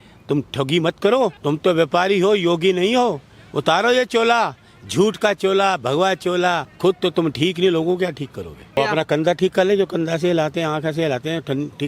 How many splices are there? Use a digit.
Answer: 3